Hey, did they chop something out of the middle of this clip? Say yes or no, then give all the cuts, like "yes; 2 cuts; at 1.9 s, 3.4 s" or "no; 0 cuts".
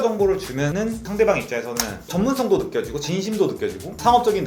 no; 0 cuts